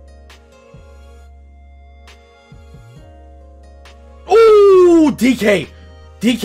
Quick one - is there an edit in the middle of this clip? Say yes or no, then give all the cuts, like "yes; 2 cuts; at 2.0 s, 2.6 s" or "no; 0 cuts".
yes; 1 cut; at 4.2 s